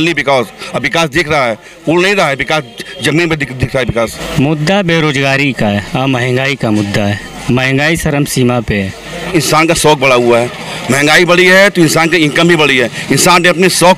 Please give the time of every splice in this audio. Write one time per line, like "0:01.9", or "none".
0:04.2
0:09.3